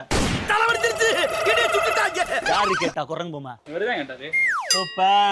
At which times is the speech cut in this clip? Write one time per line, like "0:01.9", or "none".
0:02.9